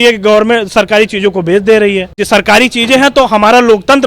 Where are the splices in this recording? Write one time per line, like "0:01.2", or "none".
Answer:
0:02.1